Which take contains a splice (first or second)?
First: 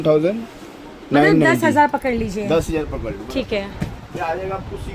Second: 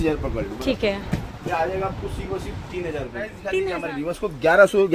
second